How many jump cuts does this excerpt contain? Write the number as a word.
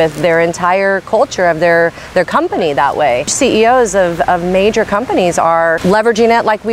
two